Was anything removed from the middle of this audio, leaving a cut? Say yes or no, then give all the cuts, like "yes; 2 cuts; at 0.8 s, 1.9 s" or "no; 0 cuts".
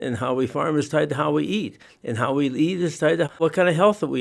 yes; 1 cut; at 3.3 s